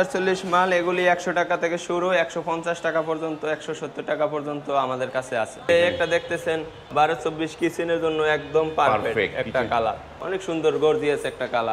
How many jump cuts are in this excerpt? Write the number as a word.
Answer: three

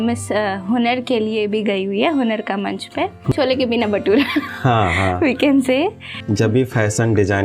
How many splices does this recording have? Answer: two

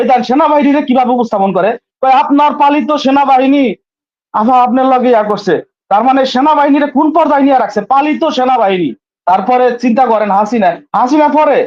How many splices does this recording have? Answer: one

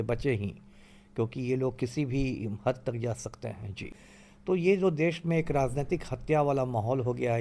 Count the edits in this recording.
one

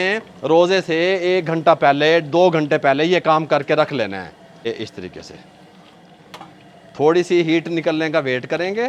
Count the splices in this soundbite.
zero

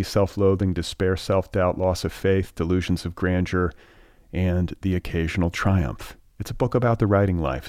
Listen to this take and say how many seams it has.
zero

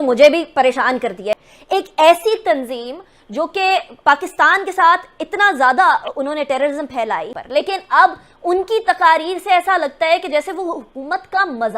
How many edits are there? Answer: two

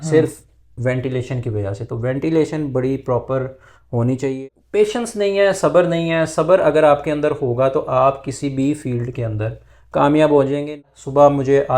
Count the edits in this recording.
two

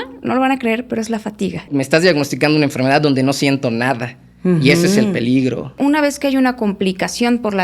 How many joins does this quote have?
two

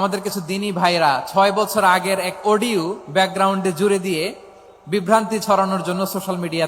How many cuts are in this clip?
zero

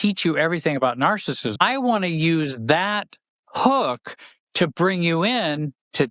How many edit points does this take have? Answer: one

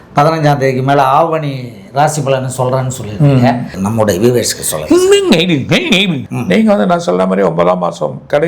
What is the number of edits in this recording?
two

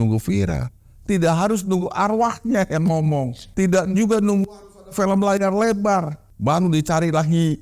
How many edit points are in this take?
two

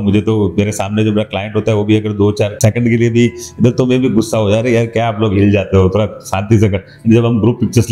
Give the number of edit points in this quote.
zero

